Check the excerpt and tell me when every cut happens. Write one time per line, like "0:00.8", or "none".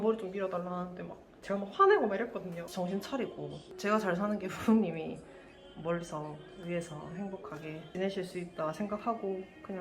0:02.7
0:07.9